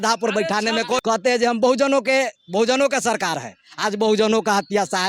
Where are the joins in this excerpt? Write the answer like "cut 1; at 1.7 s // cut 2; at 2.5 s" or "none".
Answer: cut 1; at 1.0 s